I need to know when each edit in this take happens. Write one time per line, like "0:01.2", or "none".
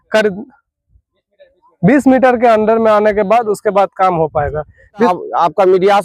0:05.1